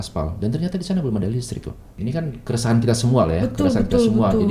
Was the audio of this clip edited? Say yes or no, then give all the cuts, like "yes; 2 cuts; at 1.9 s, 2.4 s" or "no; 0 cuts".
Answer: yes; 1 cut; at 1.8 s